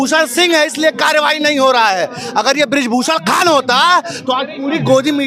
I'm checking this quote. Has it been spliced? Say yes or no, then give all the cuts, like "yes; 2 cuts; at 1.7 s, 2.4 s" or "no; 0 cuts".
no; 0 cuts